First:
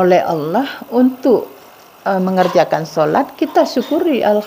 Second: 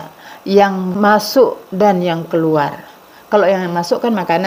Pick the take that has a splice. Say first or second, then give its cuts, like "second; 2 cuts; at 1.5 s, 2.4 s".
second; 1 cut; at 0.9 s